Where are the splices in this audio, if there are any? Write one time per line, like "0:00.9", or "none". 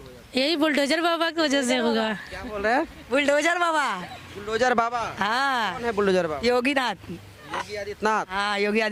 none